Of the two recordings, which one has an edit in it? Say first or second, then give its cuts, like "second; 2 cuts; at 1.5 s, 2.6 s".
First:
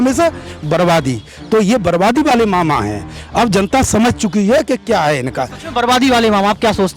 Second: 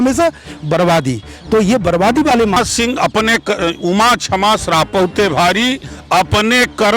second; 1 cut; at 2.6 s